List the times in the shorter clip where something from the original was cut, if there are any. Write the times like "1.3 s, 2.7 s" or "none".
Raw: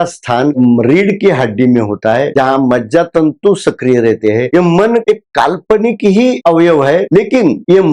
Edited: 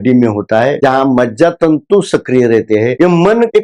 none